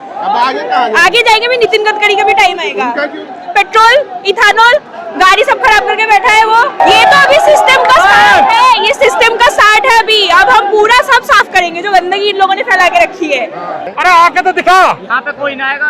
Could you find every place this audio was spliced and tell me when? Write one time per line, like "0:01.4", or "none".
0:06.8
0:13.9